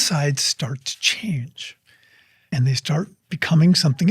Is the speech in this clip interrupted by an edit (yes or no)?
no